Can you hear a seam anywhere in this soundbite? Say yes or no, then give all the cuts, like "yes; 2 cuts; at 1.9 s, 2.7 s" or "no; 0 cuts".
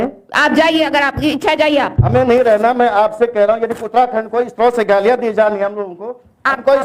no; 0 cuts